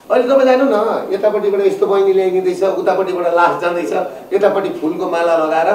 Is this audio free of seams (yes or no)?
yes